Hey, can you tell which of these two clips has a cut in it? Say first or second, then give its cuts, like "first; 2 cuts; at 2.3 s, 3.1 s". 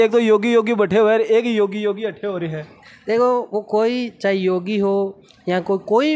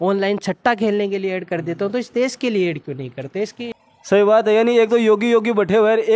second; 1 cut; at 3.6 s